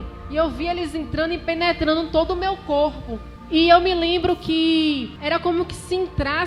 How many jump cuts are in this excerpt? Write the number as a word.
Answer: two